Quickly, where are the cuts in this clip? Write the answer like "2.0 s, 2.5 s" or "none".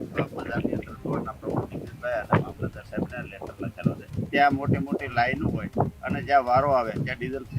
4.1 s